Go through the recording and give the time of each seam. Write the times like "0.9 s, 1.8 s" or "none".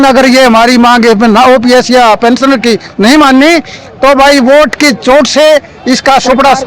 none